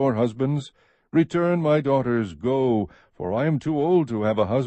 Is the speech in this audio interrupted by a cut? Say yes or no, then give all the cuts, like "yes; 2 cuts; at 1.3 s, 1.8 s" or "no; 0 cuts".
yes; 1 cut; at 3.6 s